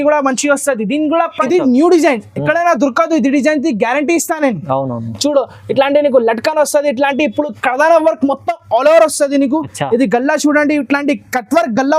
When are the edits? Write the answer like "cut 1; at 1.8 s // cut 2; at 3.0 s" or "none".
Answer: cut 1; at 1.3 s